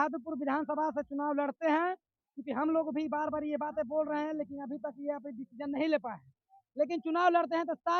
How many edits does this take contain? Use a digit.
0